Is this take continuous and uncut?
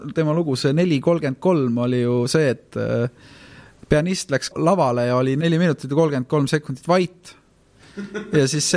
no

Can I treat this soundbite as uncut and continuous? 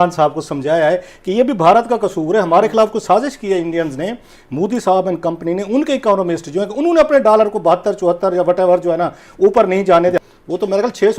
no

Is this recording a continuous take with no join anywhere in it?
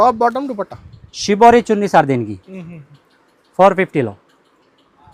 yes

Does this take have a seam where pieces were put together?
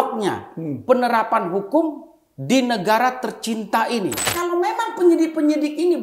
yes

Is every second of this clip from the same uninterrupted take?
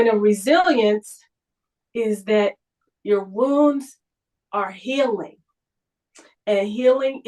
yes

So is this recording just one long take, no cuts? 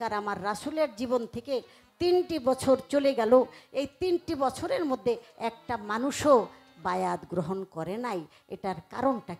yes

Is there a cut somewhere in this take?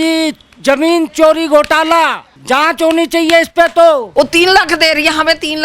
yes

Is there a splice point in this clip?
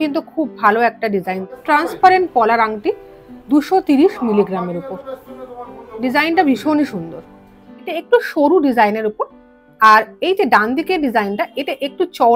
yes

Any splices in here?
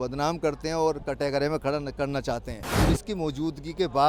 yes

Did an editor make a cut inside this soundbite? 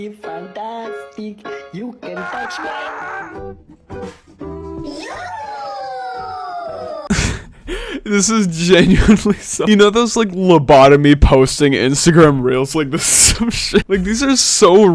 yes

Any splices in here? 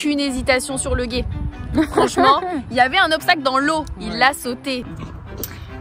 yes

